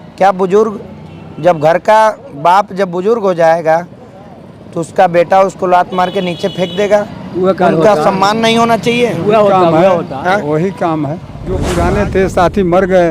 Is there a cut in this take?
yes; 1 cut; at 11.6 s

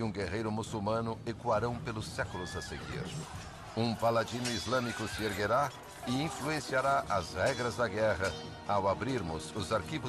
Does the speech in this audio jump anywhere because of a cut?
yes; 1 cut; at 8.1 s

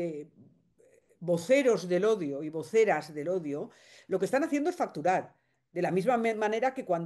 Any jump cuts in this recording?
no; 0 cuts

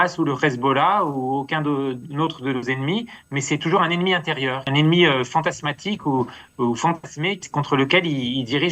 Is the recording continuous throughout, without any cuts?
no; 2 cuts; at 4.6 s, 7.4 s

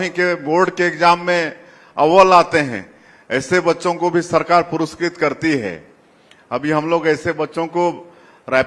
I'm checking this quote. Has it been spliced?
no; 0 cuts

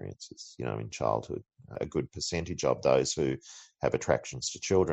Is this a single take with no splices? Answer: no; 1 cut; at 1.7 s

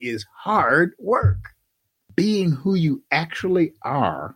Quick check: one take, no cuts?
yes; 0 cuts

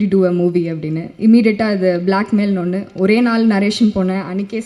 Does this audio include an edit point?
no; 0 cuts

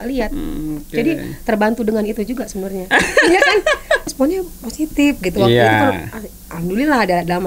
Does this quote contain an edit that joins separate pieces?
yes; 1 cut; at 4.0 s

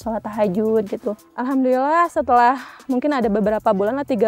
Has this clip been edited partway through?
yes; 1 cut; at 1.2 s

